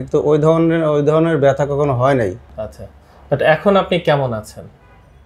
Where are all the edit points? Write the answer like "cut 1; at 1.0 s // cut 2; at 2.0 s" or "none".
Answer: cut 1; at 2.6 s